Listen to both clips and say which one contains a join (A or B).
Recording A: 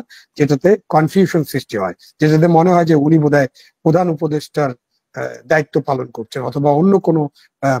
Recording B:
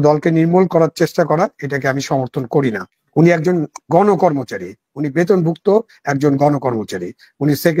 B